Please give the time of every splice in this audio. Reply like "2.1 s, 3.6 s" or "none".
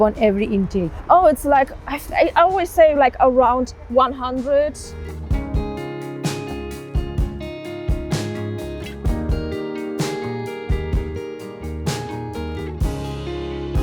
none